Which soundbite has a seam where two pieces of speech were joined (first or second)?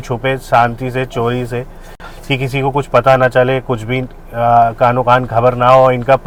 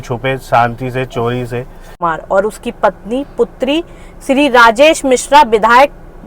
second